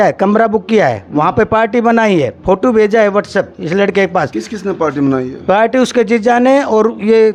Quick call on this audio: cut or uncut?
uncut